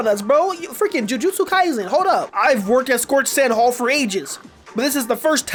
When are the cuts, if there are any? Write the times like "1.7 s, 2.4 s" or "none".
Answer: none